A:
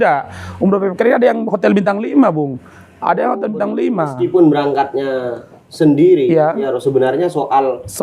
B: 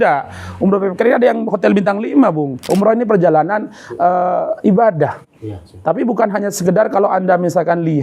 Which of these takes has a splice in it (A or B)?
B